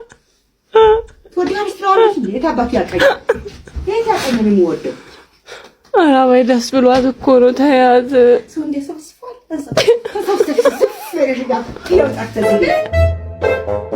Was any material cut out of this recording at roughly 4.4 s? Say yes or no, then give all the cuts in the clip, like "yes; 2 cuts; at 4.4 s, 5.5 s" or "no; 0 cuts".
no; 1 cut; at 12.8 s